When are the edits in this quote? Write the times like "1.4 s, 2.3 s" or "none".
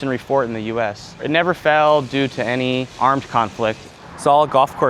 1.2 s, 2.9 s, 3.9 s